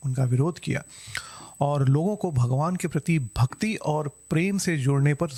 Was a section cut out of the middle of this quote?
no; 0 cuts

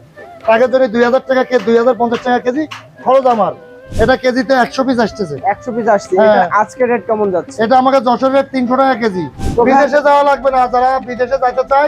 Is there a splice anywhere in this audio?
yes; 2 cuts; at 3.9 s, 9.3 s

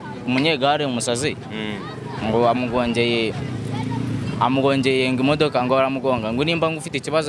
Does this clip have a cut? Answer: no; 0 cuts

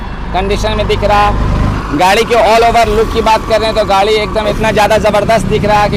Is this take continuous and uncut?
yes; 0 cuts

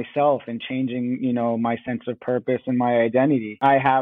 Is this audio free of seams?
yes; 0 cuts

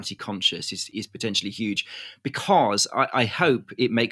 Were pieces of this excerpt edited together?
no; 0 cuts

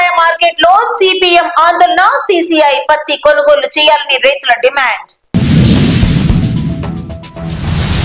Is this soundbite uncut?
yes; 0 cuts

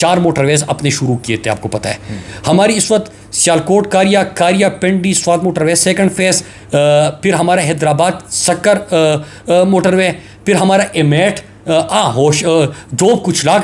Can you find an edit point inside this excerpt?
no; 0 cuts

